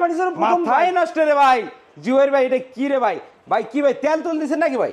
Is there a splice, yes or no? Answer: no